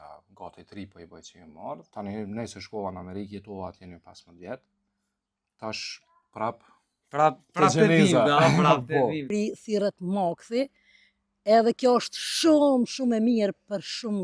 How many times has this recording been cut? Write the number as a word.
two